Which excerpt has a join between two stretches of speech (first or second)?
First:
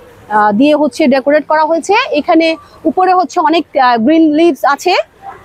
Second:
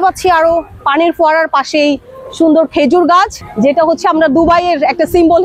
second